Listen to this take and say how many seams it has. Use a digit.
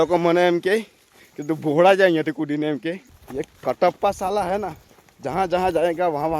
1